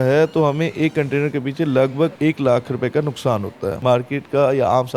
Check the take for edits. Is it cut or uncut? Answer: cut